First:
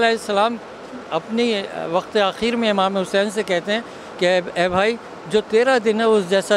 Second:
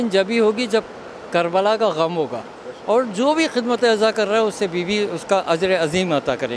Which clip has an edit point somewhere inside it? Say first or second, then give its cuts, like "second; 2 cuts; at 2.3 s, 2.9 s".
second; 1 cut; at 2.7 s